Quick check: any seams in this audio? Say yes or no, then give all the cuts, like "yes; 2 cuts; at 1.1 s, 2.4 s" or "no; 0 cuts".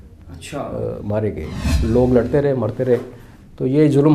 yes; 1 cut; at 1.7 s